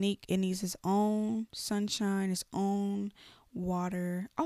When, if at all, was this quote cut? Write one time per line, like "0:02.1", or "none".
none